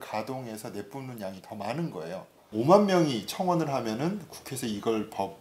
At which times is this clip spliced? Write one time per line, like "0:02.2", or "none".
0:02.4